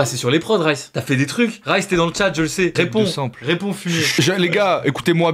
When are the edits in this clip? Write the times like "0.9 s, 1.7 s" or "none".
2.7 s, 4.1 s